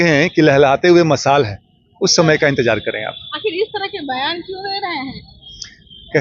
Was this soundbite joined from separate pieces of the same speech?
no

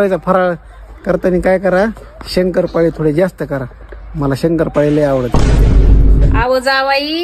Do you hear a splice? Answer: no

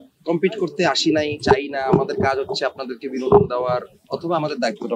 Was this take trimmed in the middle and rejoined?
no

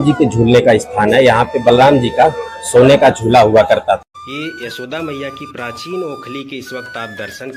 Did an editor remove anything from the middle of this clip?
yes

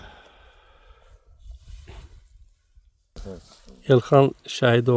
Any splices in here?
yes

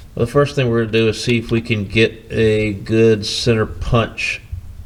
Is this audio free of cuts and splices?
yes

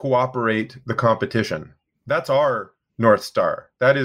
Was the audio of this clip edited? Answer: no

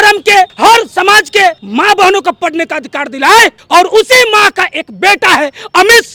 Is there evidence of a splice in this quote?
no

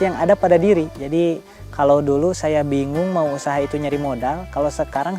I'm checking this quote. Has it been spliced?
yes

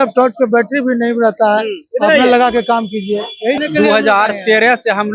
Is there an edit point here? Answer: yes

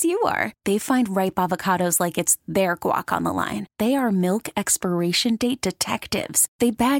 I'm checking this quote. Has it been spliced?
no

